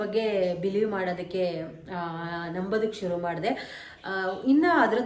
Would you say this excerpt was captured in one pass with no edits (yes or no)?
yes